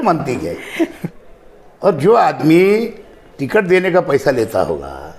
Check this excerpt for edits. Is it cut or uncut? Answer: cut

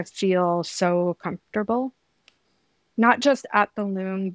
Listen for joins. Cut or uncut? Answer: uncut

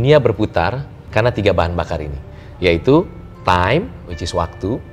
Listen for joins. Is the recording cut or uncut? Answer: cut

